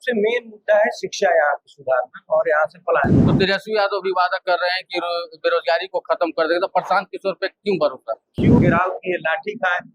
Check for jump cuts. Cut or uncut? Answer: cut